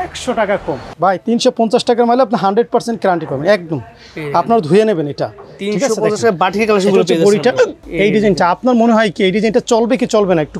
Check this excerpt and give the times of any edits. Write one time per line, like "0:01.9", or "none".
0:00.9
0:07.8